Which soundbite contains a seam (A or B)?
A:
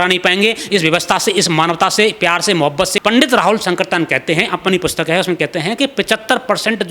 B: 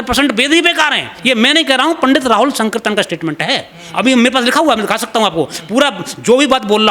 A